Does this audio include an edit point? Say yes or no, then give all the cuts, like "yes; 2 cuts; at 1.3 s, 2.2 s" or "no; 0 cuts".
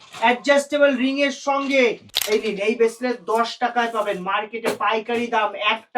yes; 1 cut; at 2.1 s